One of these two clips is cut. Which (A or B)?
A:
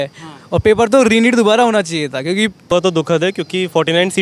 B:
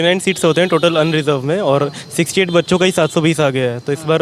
A